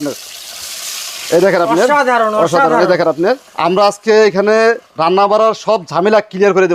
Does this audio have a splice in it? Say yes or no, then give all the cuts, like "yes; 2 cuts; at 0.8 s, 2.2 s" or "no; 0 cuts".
yes; 1 cut; at 4.8 s